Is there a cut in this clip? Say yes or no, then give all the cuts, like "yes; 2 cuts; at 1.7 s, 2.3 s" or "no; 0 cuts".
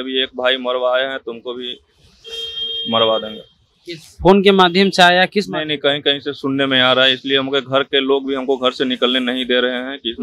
no; 0 cuts